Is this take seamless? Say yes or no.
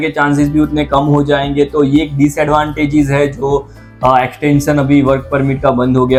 yes